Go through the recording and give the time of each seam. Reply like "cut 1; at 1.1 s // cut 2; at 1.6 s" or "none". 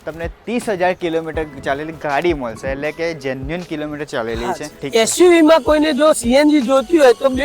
cut 1; at 4.7 s